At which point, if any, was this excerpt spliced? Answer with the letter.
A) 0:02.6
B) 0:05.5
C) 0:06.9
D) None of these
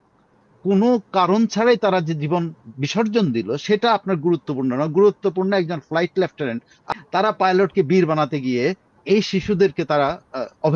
C